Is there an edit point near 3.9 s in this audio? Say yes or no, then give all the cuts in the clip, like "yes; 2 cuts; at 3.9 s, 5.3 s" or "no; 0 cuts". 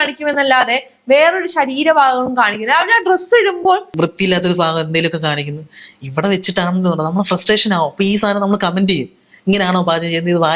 yes; 1 cut; at 3.9 s